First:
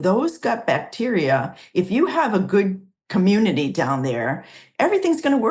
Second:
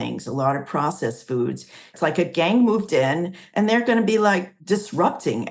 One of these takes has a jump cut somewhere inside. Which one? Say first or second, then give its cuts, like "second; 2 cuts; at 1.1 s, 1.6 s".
second; 2 cuts; at 1.9 s, 4.5 s